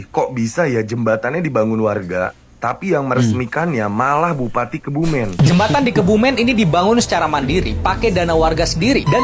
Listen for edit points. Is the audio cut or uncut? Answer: cut